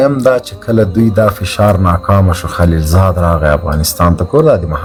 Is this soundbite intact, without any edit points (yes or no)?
yes